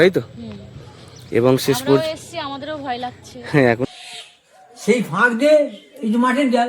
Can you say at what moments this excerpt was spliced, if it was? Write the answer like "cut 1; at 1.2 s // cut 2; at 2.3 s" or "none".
cut 1; at 3.8 s